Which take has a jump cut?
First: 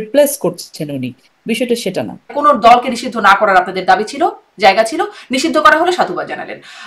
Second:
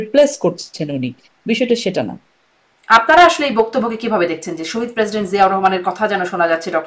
first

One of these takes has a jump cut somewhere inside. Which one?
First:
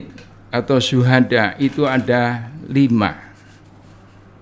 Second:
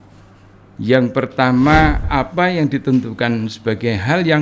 second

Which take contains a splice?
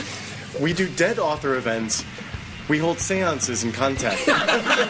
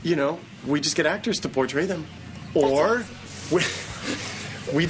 second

